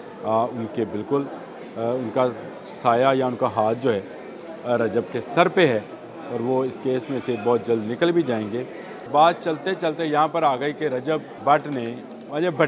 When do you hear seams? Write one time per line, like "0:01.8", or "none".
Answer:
0:09.1
0:11.3